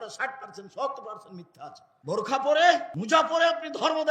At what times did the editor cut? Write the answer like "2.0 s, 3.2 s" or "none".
1.9 s, 2.9 s